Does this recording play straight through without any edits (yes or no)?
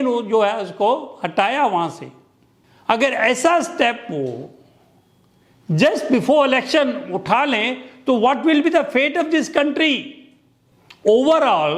yes